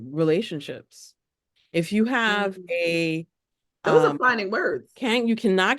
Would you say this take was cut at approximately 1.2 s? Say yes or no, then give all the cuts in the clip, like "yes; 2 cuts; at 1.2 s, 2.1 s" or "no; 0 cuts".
no; 1 cut; at 4.9 s